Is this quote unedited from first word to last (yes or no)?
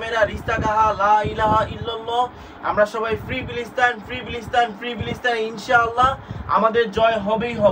yes